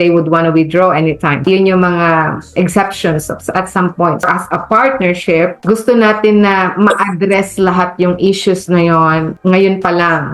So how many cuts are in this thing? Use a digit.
2